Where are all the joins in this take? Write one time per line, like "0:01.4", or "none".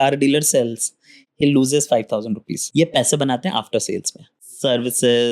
0:02.5